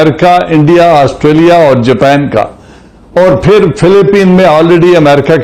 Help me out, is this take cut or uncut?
uncut